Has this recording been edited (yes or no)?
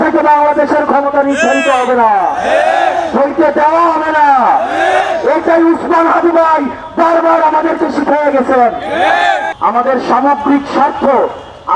yes